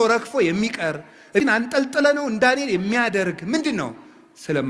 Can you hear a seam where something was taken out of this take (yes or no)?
yes